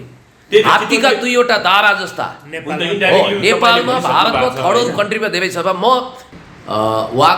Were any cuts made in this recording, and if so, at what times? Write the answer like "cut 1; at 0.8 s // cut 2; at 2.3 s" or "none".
cut 1; at 6.2 s